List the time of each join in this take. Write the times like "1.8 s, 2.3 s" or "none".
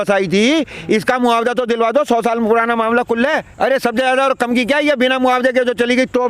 3.5 s